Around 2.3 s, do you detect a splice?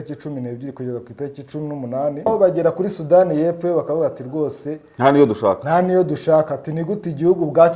yes; 1 cut; at 2.3 s

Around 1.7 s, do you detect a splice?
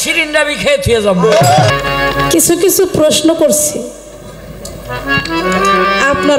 yes; 1 cut; at 1.7 s

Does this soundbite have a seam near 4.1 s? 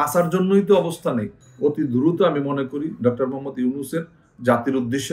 no; 1 cut; at 1.4 s

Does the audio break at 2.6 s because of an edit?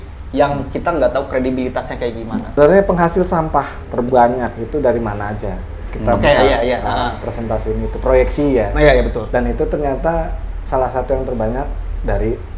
yes; 1 cut; at 2.6 s

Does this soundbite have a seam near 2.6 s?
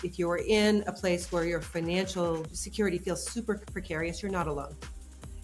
yes; 1 cut; at 2.6 s

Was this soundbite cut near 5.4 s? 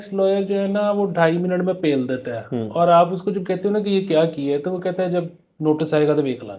no; 0 cuts

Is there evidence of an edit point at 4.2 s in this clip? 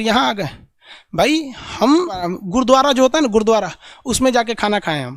no; 1 cut; at 2.3 s

